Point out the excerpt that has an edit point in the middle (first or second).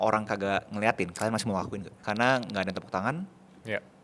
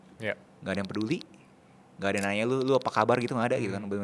first